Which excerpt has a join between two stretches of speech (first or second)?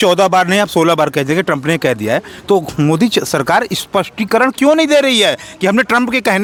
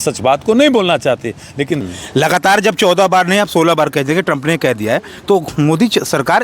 second